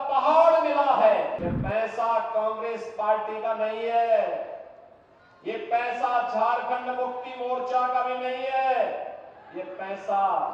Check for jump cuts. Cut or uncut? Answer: cut